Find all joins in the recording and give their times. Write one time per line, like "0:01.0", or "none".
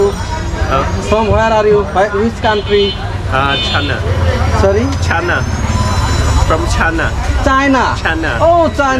none